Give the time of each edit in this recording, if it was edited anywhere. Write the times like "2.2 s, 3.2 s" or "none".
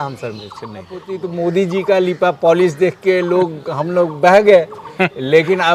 1.0 s